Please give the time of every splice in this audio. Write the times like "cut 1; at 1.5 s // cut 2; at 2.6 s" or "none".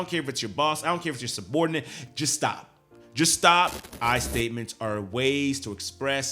cut 1; at 2.0 s // cut 2; at 3.9 s